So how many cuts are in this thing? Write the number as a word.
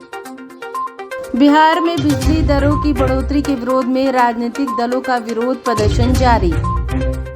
one